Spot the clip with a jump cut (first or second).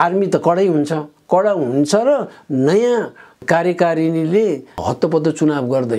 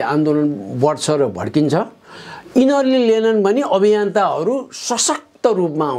first